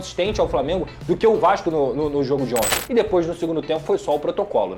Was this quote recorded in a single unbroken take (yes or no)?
no